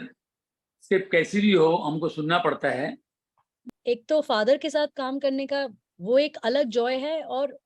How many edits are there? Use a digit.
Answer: 1